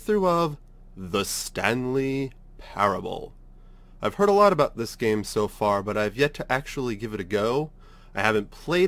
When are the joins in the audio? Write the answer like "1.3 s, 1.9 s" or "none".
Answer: none